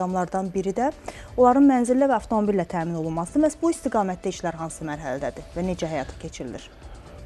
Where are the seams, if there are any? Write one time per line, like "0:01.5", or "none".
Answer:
none